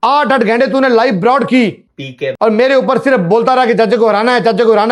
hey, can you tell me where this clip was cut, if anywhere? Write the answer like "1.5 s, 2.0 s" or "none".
none